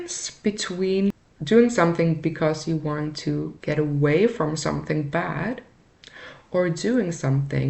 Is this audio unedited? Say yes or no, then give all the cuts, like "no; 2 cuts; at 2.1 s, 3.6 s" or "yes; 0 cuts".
no; 2 cuts; at 1.3 s, 3.5 s